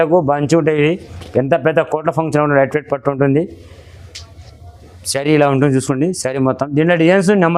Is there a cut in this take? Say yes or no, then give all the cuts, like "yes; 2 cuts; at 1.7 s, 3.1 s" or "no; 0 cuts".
no; 0 cuts